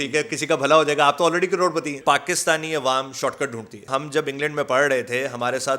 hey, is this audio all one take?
no; 2 cuts; at 2.0 s, 3.9 s

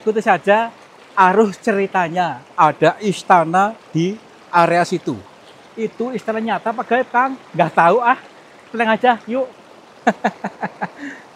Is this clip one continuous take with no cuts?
yes; 0 cuts

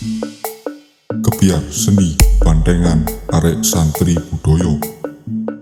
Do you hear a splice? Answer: no; 0 cuts

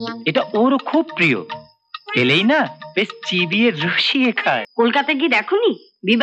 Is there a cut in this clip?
yes; 1 cut; at 4.7 s

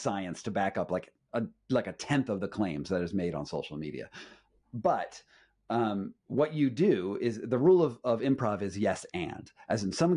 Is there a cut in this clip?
no; 0 cuts

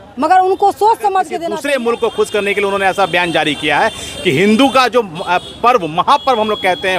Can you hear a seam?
yes; 1 cut; at 1.4 s

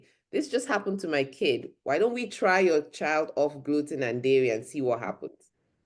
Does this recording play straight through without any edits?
yes; 0 cuts

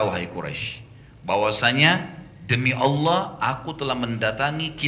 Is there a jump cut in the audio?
no; 0 cuts

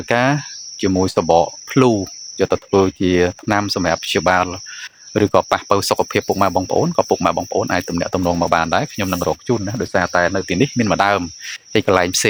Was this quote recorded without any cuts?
yes; 0 cuts

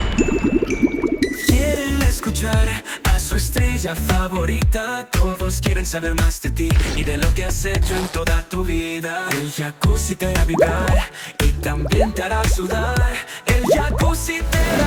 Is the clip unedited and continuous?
yes; 0 cuts

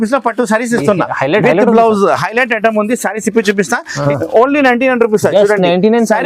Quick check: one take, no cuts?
no; 1 cut; at 4.0 s

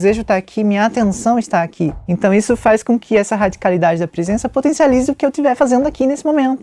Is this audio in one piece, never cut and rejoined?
no; 1 cut; at 2.0 s

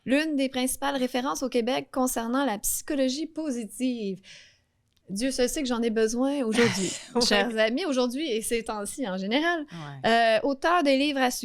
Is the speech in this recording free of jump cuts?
yes; 0 cuts

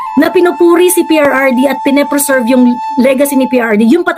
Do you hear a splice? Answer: no; 0 cuts

